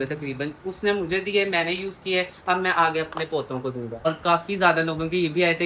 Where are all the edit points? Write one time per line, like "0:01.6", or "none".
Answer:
0:04.1